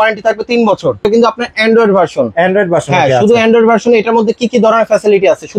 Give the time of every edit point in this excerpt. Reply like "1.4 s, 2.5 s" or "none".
1.0 s

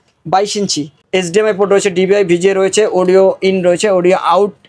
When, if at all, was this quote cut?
1.0 s

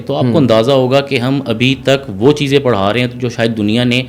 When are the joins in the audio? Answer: none

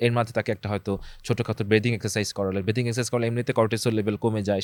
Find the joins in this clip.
none

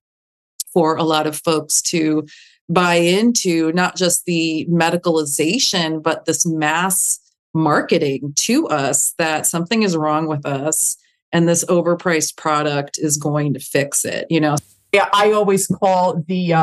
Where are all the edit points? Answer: 14.9 s

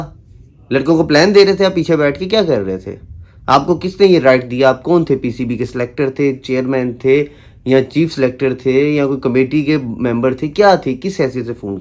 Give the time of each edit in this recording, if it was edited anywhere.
none

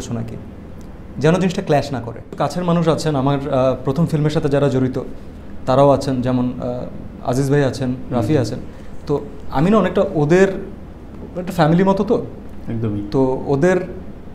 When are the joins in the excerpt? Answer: 2.3 s

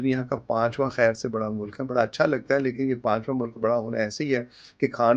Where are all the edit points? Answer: none

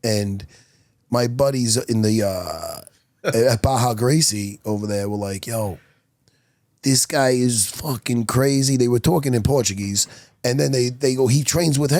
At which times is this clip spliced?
none

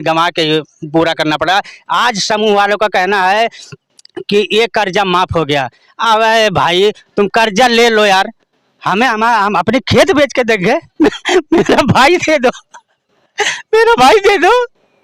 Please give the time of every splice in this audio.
none

